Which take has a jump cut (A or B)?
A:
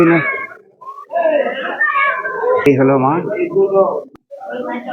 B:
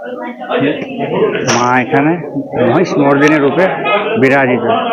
A